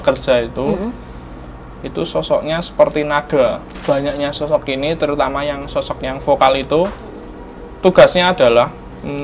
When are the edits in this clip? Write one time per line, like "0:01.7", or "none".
0:03.7